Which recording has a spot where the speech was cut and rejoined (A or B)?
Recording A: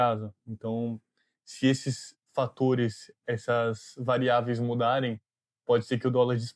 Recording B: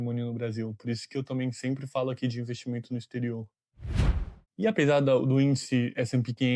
B